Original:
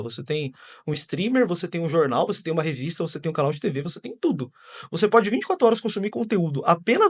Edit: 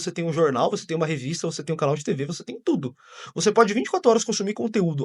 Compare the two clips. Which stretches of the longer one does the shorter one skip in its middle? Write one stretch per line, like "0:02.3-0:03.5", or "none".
none